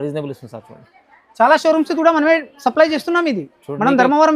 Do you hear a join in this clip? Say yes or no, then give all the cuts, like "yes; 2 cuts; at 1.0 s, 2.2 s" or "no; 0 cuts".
yes; 1 cut; at 0.9 s